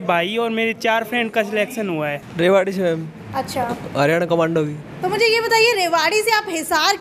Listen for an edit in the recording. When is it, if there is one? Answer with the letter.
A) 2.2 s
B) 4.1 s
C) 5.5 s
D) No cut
A